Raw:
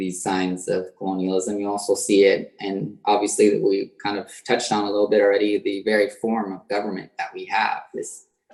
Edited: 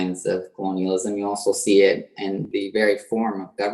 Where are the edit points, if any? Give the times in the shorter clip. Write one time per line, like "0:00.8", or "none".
0:02.5